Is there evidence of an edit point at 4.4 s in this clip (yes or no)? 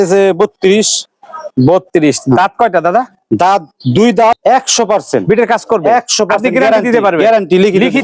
yes